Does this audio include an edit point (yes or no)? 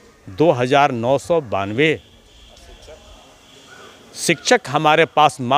no